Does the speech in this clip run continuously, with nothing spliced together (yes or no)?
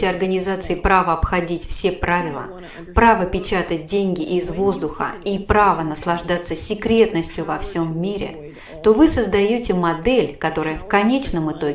yes